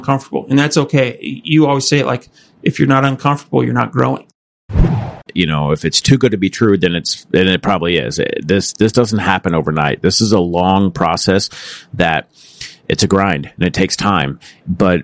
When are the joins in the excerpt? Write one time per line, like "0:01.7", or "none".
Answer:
0:04.8